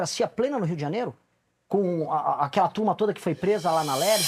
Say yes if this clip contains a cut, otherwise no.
no